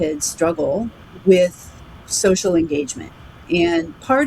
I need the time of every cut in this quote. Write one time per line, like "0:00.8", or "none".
0:01.0

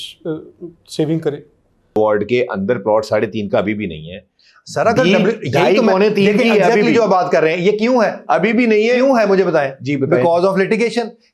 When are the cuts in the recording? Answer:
0:02.0

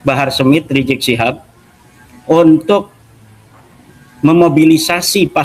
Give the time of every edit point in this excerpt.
none

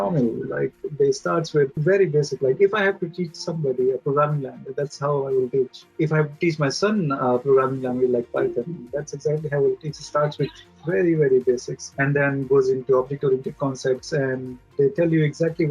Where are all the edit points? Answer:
0:01.8
0:05.9
0:11.8

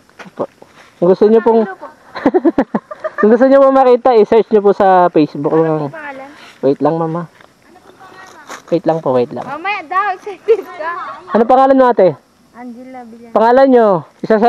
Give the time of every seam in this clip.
0:01.4

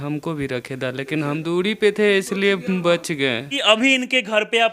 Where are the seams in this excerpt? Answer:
0:01.4
0:03.6

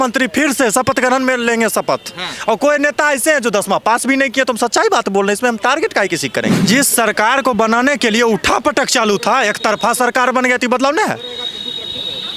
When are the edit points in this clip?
0:06.6

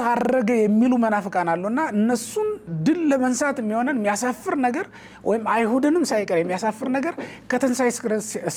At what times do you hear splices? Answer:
none

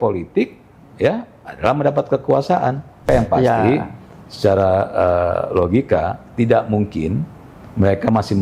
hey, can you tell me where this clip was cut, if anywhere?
0:03.0

